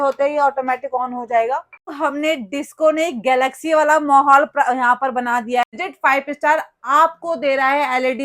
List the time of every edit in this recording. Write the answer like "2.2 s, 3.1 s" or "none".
1.8 s, 5.6 s